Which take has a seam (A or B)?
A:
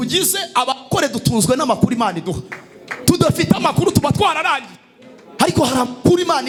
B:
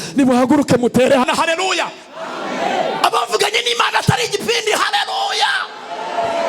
B